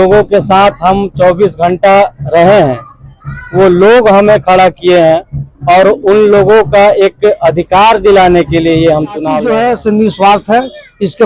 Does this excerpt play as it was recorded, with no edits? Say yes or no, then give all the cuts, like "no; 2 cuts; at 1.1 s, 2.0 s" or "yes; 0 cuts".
no; 1 cut; at 9.4 s